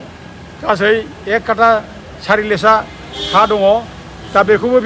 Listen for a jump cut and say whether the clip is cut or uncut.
uncut